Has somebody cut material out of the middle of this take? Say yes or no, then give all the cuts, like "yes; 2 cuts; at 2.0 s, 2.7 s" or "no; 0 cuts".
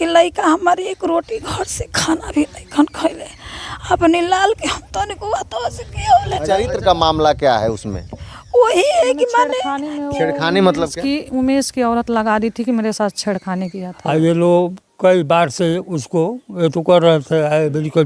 yes; 2 cuts; at 6.6 s, 13.9 s